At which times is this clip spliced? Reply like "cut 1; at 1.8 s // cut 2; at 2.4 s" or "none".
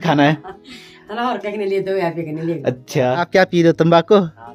cut 1; at 3.2 s